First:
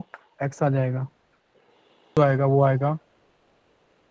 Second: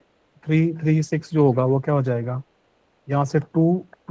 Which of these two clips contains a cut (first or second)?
first